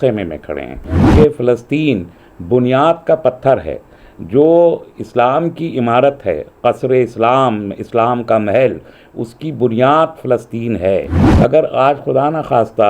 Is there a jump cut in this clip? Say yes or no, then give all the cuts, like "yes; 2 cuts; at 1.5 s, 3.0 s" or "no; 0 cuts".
yes; 2 cuts; at 1.0 s, 11.2 s